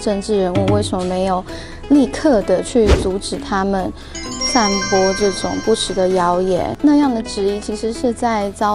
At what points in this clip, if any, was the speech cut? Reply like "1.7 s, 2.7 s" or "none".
6.8 s